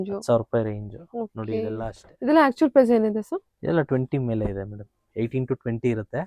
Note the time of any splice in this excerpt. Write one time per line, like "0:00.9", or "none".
0:02.0